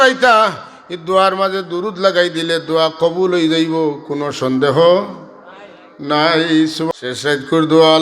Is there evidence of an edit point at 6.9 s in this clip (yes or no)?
yes